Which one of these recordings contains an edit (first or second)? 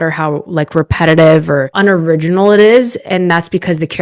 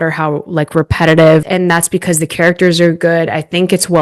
second